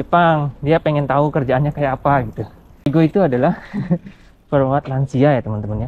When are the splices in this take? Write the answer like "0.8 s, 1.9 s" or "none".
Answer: 2.9 s